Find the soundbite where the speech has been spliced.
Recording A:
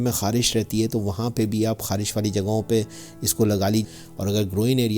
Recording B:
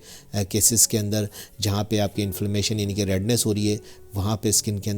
A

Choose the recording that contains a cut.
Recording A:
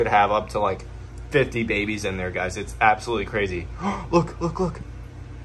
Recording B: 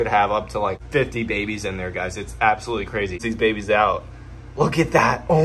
B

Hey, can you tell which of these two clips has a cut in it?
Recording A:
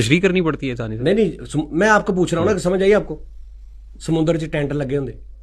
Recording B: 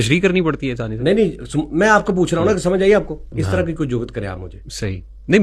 B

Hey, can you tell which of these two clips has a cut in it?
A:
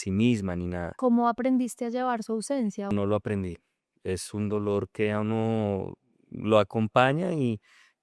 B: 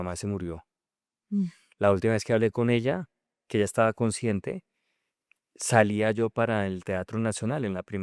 A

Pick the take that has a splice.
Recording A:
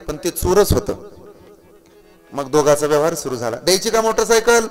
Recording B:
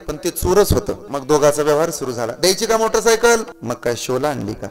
B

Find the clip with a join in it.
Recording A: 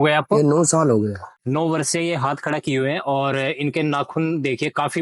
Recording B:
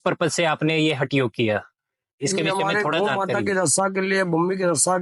A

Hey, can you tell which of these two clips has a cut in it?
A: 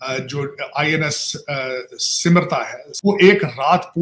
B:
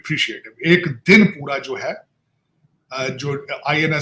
A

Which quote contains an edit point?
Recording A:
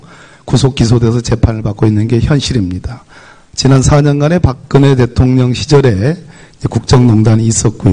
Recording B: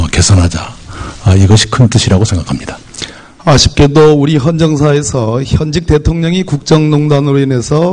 A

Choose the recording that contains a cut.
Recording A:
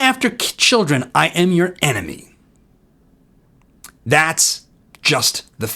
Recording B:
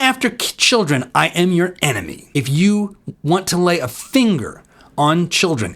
B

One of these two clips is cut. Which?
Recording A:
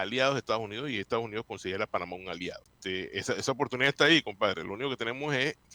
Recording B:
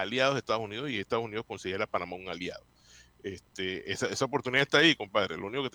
A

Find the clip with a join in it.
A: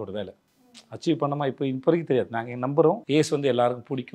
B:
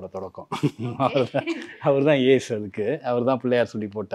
A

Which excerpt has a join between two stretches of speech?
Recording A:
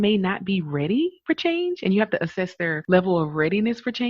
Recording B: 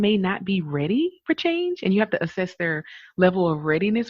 A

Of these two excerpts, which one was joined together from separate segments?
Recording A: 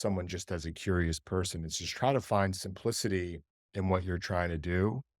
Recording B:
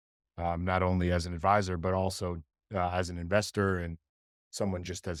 A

